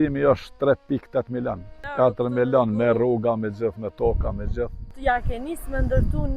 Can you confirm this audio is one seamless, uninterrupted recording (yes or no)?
no